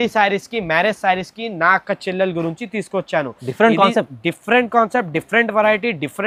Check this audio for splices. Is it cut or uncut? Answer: uncut